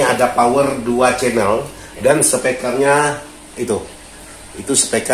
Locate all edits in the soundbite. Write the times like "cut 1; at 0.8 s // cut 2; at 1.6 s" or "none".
cut 1; at 1.8 s